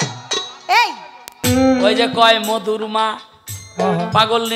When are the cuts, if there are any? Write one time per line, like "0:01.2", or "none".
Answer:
0:01.4